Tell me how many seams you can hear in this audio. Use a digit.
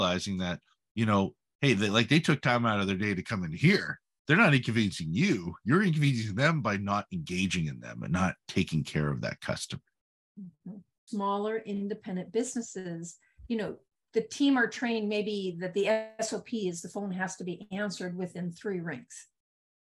1